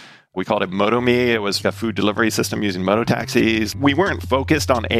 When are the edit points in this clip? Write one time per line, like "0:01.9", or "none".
0:01.6
0:04.0

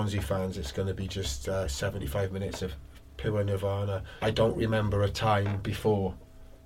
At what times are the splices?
0:04.1

